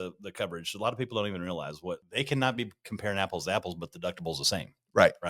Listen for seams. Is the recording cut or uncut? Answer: cut